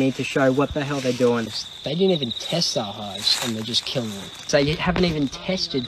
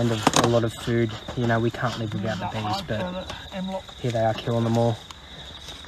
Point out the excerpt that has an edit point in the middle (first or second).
first